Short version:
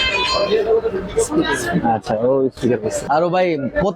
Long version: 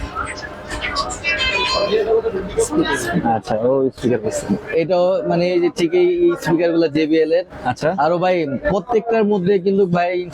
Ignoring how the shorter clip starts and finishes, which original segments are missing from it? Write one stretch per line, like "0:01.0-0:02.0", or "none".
0:04.5-0:07.9